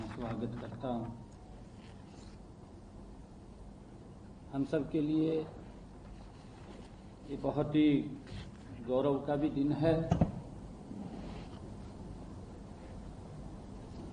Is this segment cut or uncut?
uncut